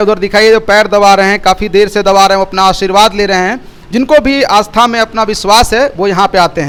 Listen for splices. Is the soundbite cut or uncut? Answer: uncut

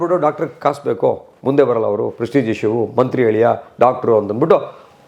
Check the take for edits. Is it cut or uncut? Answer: uncut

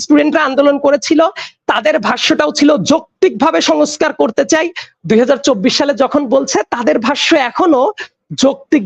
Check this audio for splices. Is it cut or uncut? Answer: uncut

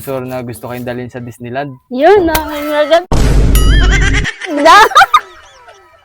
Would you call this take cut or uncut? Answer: cut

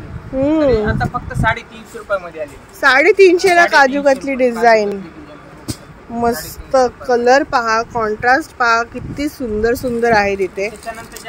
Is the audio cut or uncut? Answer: uncut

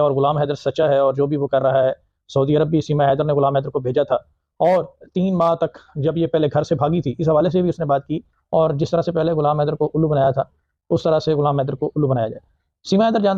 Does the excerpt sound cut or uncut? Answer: cut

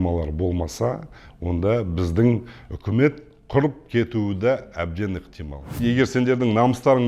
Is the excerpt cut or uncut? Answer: cut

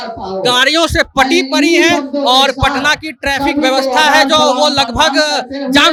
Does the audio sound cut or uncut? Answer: uncut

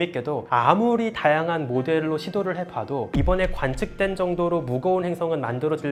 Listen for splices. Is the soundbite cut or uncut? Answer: uncut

